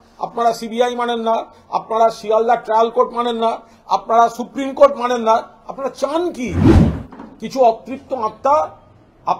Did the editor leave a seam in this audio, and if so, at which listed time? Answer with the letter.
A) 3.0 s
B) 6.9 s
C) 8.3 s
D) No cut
D